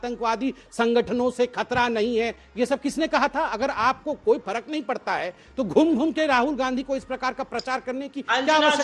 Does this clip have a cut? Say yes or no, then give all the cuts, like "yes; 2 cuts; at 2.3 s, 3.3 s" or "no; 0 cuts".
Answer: no; 0 cuts